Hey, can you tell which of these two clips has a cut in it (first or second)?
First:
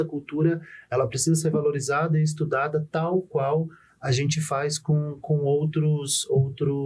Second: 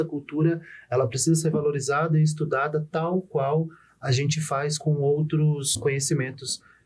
second